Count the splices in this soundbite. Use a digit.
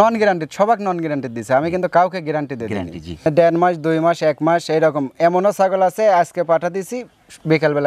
0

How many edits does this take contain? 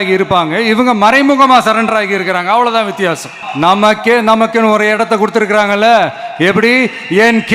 1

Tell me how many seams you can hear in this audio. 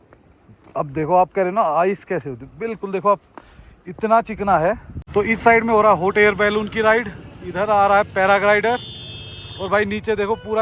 1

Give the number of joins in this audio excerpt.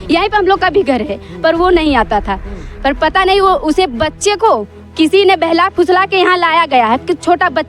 0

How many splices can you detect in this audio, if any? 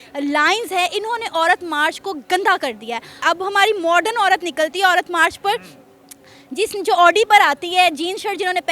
1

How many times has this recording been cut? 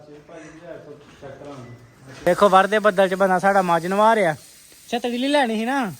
1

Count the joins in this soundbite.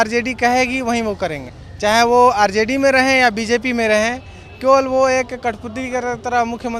0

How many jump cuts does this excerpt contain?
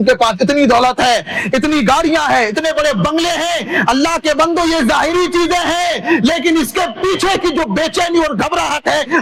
0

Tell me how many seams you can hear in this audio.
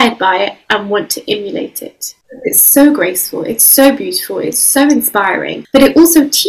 2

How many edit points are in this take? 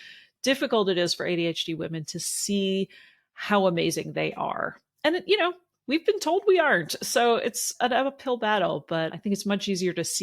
2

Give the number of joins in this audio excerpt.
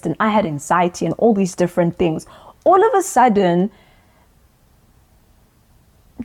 0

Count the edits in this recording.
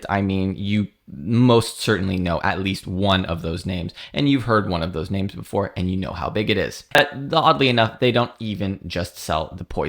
1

